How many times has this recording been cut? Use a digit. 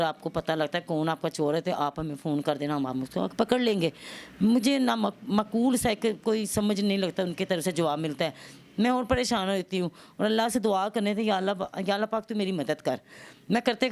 0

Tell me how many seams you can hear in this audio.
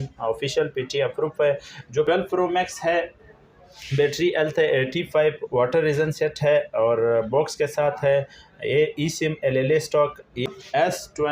2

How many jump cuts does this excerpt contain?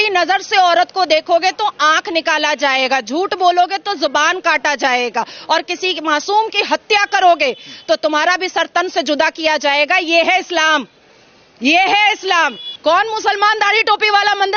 1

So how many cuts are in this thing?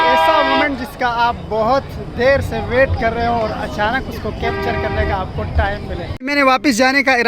1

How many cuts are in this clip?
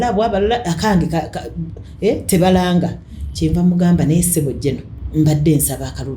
1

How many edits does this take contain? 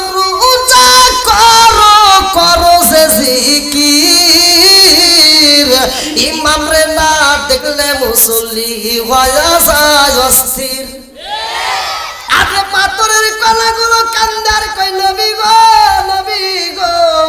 1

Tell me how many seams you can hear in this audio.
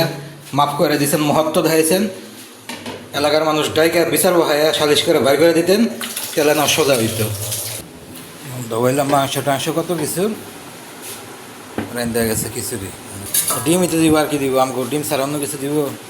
2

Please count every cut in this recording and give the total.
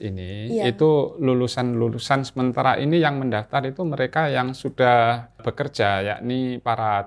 1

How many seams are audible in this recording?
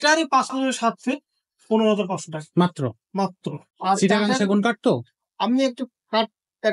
1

